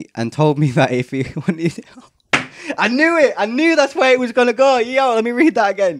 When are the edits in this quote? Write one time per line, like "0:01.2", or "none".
none